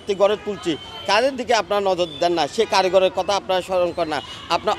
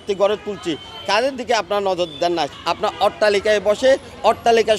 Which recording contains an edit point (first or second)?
second